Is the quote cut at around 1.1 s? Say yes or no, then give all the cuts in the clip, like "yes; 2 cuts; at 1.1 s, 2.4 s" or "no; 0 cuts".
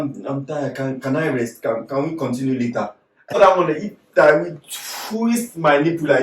no; 1 cut; at 3.4 s